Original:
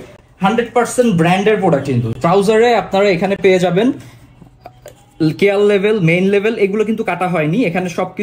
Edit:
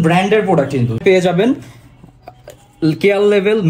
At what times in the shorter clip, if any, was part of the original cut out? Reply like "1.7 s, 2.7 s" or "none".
1.0 s